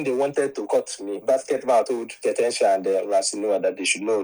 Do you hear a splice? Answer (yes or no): yes